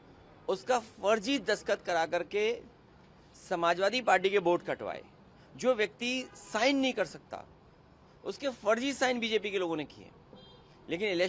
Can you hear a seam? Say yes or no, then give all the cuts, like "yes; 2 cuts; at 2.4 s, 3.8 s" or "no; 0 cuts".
no; 0 cuts